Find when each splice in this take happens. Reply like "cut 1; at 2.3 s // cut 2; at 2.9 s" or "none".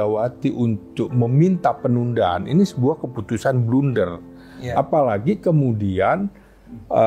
none

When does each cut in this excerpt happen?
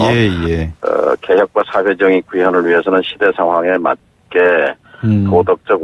cut 1; at 2.5 s

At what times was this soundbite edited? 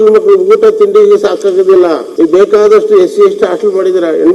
cut 1; at 2.1 s

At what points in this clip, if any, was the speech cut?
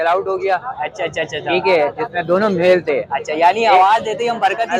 none

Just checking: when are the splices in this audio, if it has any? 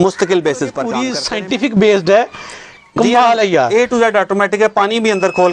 cut 1; at 1.1 s

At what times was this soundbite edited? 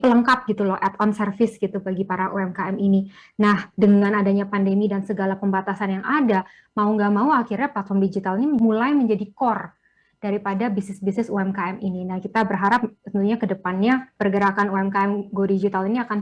cut 1; at 8.6 s // cut 2; at 14.1 s

